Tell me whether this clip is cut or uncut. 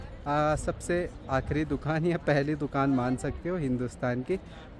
uncut